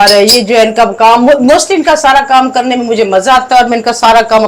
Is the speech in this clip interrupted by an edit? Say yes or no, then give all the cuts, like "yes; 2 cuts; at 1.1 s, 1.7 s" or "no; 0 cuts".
no; 0 cuts